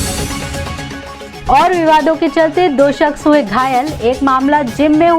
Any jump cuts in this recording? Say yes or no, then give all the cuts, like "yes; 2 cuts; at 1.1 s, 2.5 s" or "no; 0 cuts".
no; 0 cuts